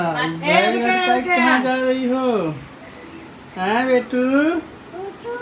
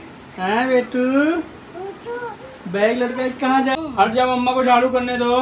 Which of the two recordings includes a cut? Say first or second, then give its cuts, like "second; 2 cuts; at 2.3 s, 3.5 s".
second; 1 cut; at 3.8 s